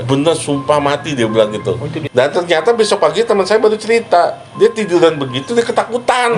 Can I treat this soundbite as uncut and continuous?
no; 1 cut; at 1.9 s

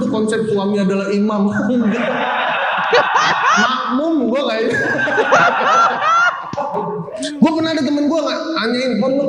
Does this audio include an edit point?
no; 0 cuts

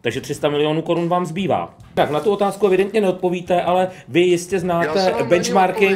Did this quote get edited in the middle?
yes; 1 cut; at 2.0 s

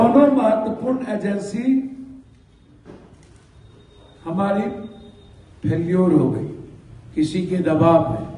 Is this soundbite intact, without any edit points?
yes; 0 cuts

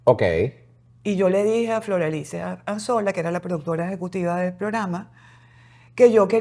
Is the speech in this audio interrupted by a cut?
no; 0 cuts

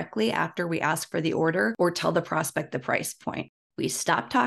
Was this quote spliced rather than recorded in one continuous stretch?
yes; 2 cuts; at 1.7 s, 3.7 s

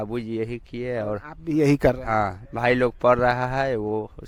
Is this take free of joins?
yes; 0 cuts

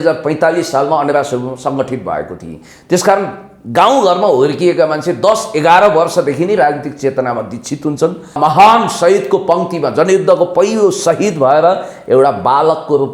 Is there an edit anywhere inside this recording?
yes; 1 cut; at 8.4 s

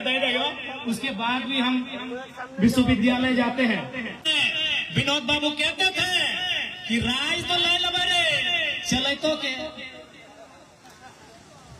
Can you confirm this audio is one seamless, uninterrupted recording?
no; 1 cut; at 4.2 s

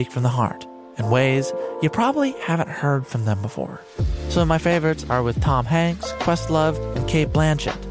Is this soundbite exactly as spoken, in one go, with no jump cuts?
yes; 0 cuts

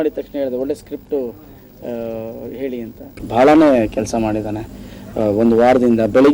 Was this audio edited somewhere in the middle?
yes; 1 cut; at 3.2 s

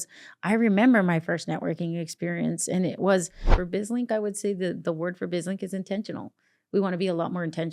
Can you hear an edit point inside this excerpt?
yes; 1 cut; at 3.6 s

